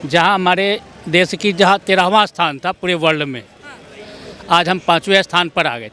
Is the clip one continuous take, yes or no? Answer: yes